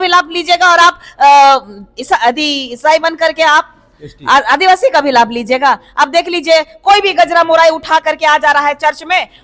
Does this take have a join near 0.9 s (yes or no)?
no